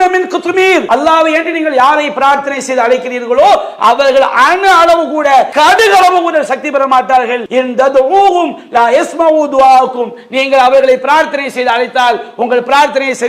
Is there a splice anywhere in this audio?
yes; 3 cuts; at 0.8 s, 5.5 s, 7.4 s

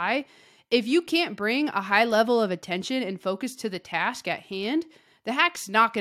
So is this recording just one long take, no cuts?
yes; 0 cuts

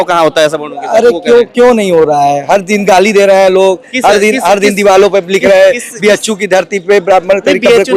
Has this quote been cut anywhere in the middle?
no; 0 cuts

